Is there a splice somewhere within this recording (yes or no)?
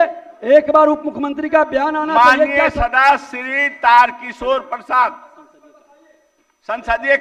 no